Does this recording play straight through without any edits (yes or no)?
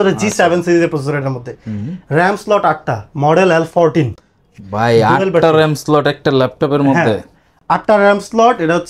yes